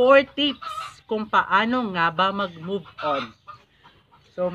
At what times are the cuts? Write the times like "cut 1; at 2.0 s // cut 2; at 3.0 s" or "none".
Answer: cut 1; at 3.5 s